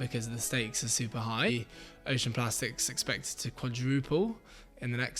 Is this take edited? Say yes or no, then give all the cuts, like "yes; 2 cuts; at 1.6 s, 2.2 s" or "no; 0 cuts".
yes; 1 cut; at 1.5 s